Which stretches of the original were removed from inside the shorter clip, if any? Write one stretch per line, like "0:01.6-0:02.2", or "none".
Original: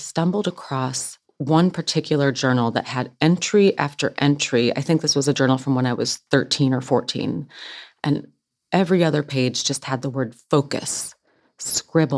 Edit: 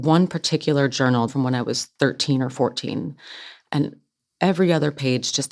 0:02.7-0:05.6